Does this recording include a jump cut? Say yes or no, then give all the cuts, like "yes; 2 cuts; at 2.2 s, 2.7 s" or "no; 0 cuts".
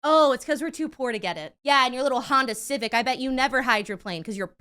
yes; 1 cut; at 1.5 s